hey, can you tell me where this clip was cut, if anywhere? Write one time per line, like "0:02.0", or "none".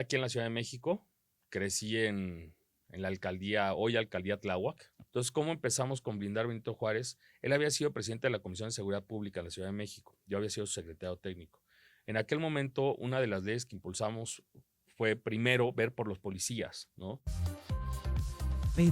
0:04.9
0:17.4